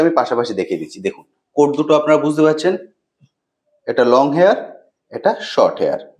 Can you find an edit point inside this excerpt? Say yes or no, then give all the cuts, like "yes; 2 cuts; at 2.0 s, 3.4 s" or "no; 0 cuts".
no; 0 cuts